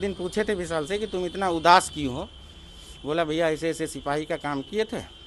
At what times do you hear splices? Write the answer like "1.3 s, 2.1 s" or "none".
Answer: none